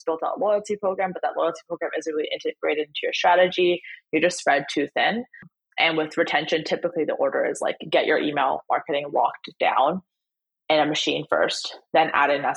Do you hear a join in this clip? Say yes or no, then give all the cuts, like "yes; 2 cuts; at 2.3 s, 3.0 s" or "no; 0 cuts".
yes; 1 cut; at 5.5 s